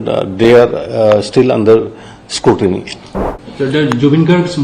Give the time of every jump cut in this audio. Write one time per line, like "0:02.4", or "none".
0:03.1

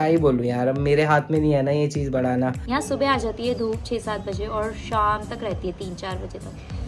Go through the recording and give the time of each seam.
0:02.6

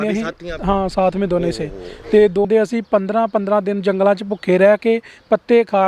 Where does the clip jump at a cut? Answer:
0:02.5

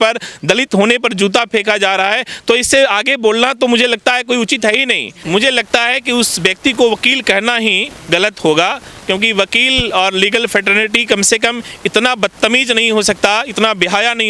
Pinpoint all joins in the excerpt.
0:05.1

